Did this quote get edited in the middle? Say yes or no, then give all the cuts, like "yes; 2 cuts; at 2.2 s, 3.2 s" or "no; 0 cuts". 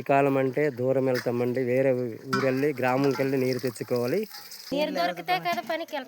yes; 1 cut; at 4.7 s